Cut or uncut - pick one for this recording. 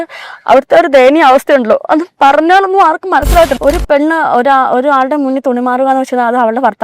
cut